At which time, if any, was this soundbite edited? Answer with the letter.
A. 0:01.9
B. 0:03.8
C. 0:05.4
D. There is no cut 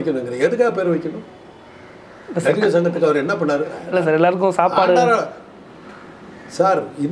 B